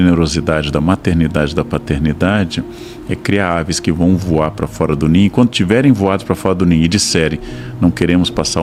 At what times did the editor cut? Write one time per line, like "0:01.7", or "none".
none